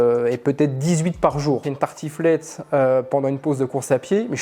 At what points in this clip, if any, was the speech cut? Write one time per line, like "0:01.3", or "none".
0:01.7